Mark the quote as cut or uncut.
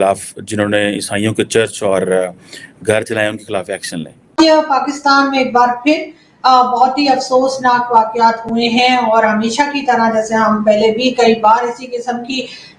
cut